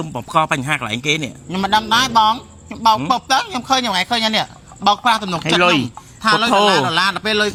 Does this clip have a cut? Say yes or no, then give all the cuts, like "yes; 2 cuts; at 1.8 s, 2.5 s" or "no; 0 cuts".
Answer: no; 0 cuts